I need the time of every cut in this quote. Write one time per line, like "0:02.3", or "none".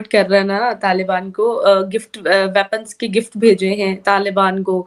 none